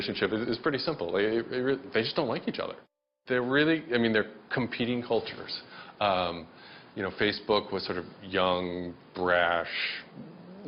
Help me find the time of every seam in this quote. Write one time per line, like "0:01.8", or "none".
none

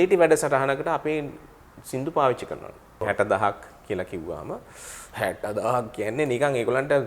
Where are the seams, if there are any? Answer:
0:03.0

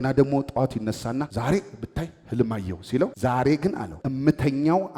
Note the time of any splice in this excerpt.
0:01.3
0:03.1
0:04.0

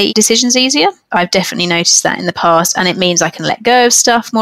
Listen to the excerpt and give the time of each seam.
none

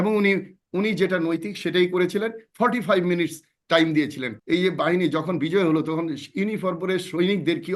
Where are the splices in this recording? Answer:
0:04.3

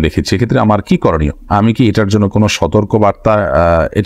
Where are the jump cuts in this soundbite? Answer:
none

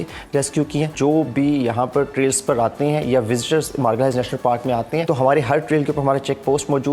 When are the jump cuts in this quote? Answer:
0:00.9
0:05.0

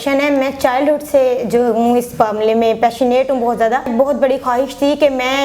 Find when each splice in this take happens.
0:03.9

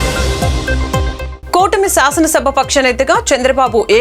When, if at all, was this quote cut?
0:01.3

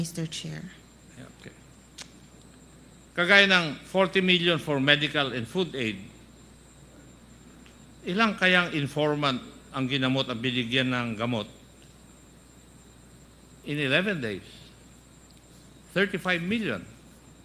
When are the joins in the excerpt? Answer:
0:02.4

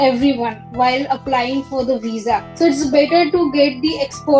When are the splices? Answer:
0:02.5

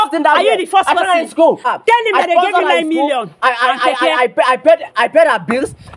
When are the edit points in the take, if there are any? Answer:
0:01.6

